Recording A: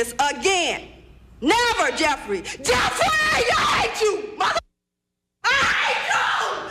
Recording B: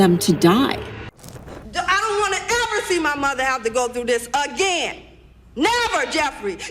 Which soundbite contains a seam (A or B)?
B